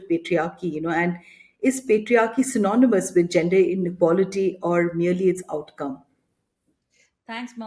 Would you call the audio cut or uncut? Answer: uncut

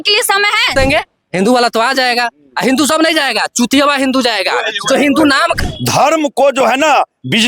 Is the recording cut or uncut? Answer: cut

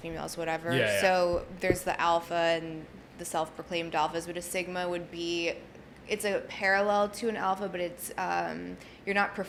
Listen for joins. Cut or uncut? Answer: uncut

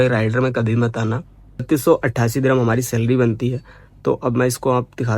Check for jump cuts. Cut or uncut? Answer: cut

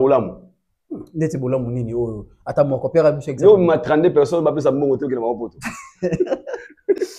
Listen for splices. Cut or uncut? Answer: uncut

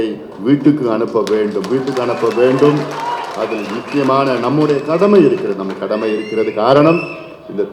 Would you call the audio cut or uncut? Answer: uncut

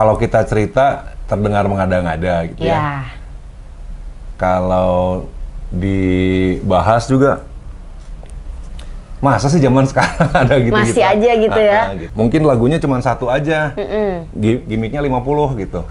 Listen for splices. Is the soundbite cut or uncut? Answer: cut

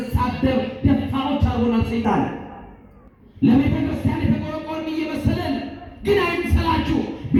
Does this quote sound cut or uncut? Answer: uncut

